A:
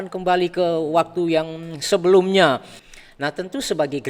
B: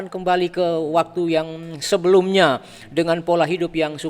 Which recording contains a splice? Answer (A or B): A